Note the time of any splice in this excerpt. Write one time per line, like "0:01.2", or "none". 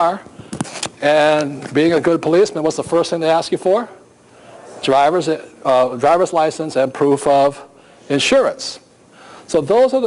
0:03.0